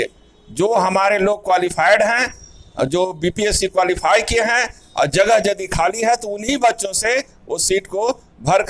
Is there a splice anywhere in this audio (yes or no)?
no